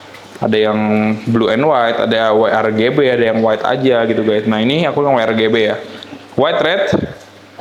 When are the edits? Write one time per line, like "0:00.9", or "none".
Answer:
none